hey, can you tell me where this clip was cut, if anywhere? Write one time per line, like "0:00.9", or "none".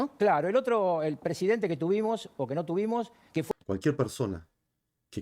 0:03.5

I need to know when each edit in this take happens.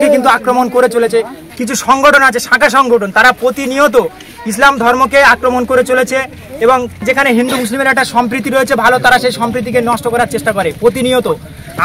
0:01.4

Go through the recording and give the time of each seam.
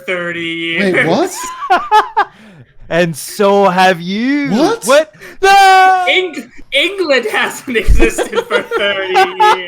none

